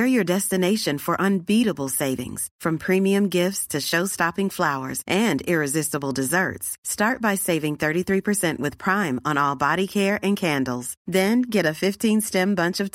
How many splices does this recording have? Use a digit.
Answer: 0